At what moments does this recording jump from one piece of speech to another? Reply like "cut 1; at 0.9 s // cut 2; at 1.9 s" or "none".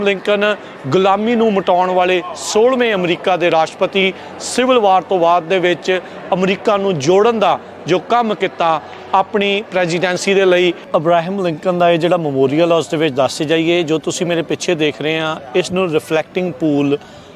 cut 1; at 10.8 s